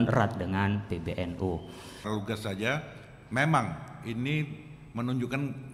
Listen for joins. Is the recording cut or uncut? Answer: cut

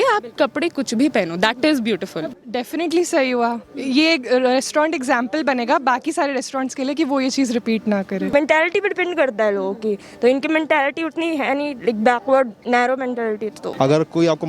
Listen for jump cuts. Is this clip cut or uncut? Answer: cut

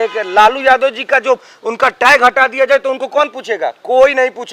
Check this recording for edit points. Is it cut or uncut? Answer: uncut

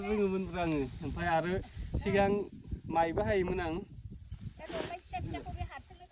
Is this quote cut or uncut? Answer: uncut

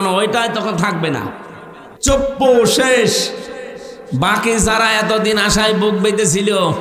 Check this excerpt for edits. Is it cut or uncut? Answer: cut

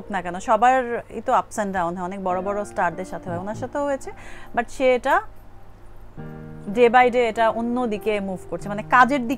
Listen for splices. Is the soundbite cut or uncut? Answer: uncut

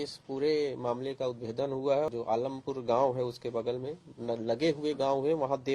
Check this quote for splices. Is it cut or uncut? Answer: cut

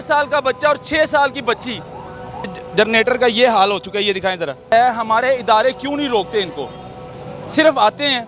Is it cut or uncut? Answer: cut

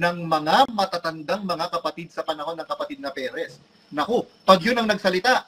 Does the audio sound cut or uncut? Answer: uncut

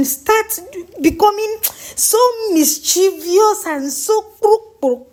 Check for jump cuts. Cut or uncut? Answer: uncut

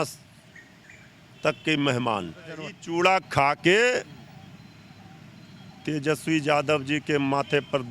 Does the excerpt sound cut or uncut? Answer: cut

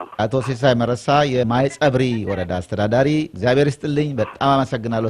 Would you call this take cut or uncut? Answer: uncut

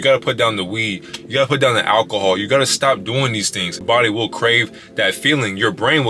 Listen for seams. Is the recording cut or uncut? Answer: cut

